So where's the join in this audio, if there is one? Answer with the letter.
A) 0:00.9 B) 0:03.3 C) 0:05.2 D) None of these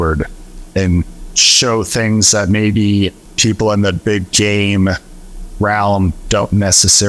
B